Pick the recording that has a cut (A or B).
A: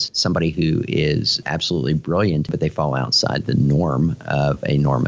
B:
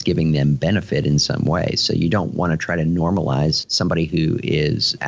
A